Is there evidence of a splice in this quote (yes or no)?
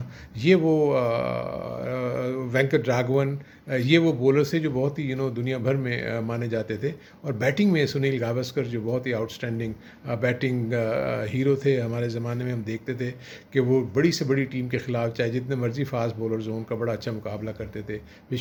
no